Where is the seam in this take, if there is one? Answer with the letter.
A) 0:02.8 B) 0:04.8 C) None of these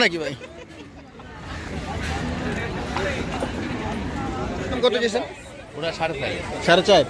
B